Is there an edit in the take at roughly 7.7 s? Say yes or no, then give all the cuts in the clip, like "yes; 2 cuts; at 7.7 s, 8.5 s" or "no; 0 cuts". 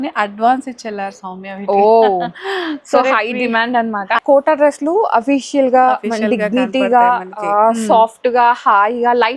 no; 1 cut; at 4.2 s